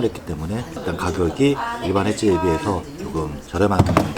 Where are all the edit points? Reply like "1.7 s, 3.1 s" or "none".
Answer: none

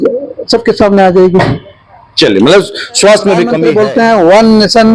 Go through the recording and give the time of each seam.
3.6 s

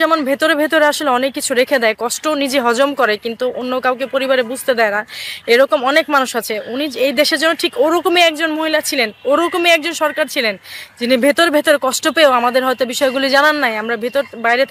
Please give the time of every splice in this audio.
none

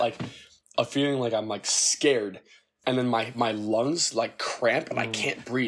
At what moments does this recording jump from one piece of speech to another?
none

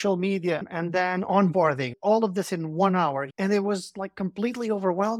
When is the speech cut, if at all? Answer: 2.0 s, 3.3 s

